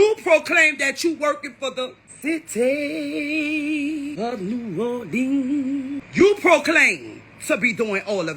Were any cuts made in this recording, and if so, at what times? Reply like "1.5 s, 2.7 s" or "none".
none